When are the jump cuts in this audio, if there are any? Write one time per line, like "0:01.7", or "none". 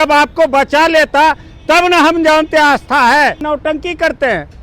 0:03.4